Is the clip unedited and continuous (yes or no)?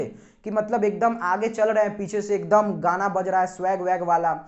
yes